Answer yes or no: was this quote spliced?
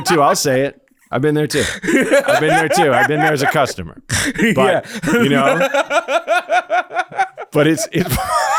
no